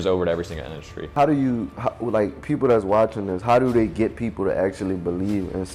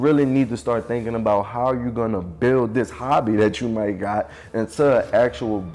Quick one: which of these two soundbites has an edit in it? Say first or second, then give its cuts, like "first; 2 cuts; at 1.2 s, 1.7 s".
first; 1 cut; at 1.1 s